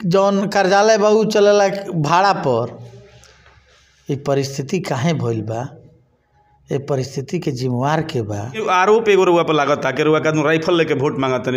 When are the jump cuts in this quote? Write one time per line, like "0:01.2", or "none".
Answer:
0:08.6